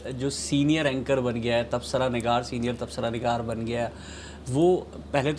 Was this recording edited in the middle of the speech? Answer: no; 0 cuts

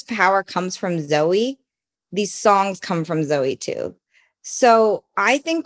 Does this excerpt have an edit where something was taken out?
no; 0 cuts

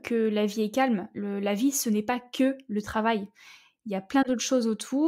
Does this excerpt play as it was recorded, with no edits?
yes; 0 cuts

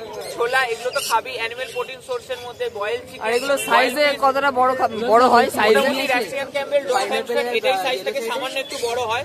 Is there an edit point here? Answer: no; 0 cuts

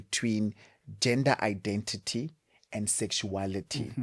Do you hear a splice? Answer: no; 0 cuts

